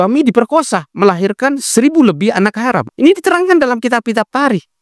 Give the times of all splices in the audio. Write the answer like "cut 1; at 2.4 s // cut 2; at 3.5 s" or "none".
none